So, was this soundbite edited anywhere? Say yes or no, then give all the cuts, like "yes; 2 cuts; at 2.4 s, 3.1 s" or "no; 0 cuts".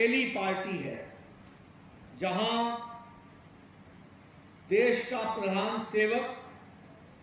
no; 0 cuts